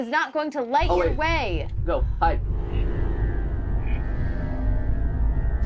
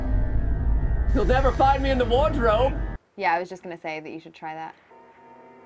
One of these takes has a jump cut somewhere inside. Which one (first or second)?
second